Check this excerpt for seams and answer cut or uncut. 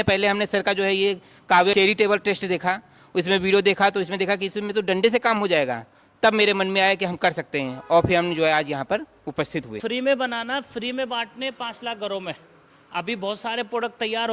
cut